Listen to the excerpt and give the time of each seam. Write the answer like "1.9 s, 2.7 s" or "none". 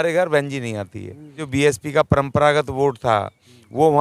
1.4 s